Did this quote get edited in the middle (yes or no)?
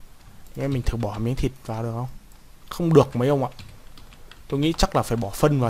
no